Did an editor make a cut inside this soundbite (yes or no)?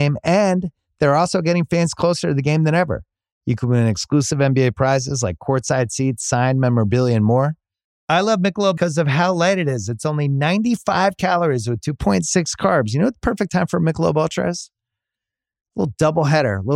no